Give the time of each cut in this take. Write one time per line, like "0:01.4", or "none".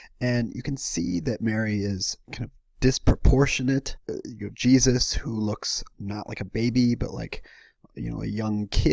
none